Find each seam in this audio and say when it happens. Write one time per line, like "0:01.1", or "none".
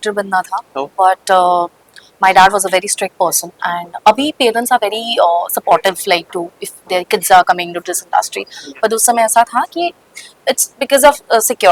none